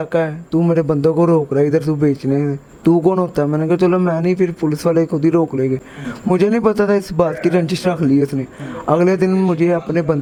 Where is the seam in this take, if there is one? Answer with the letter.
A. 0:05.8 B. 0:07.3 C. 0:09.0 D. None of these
D